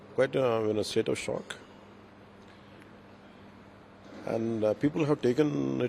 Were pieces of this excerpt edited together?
no; 0 cuts

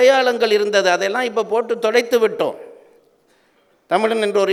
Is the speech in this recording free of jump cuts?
yes; 0 cuts

